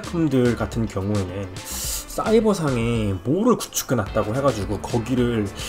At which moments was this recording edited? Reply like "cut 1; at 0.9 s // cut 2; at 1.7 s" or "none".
none